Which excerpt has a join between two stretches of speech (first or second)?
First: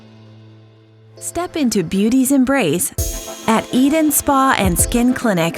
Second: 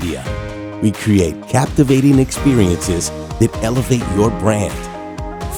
first